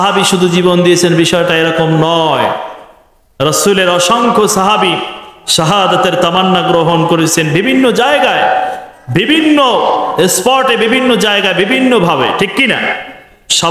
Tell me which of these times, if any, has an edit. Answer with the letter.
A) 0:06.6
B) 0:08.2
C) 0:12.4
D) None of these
D